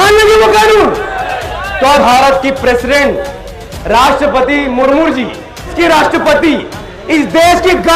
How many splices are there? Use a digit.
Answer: 2